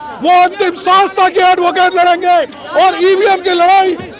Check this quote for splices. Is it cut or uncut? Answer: uncut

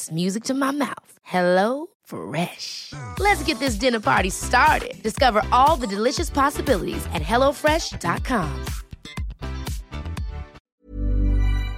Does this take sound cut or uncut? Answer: cut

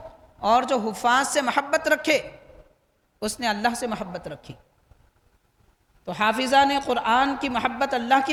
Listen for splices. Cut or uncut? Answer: uncut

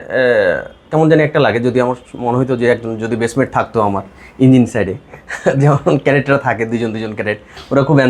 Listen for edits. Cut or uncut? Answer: uncut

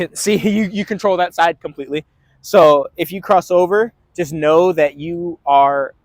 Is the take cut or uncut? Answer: uncut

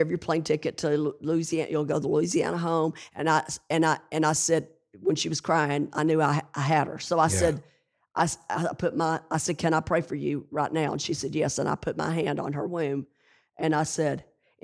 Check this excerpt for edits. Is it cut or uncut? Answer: uncut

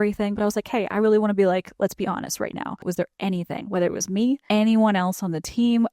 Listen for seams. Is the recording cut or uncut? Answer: cut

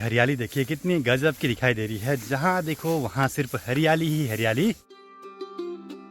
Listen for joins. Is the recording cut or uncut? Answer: uncut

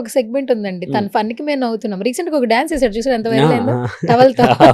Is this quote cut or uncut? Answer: uncut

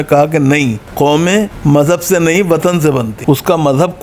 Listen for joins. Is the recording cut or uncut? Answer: cut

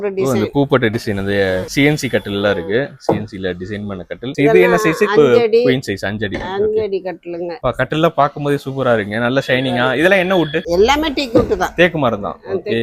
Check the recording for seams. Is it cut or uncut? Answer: uncut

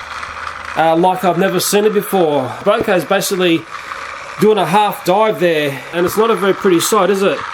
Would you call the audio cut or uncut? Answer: cut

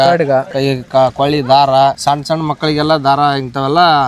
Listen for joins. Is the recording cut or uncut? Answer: uncut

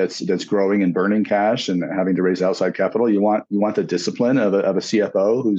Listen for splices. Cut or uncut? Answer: uncut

